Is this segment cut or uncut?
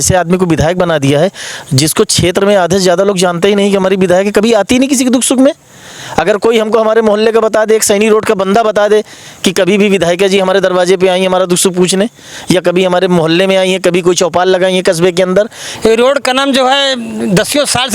cut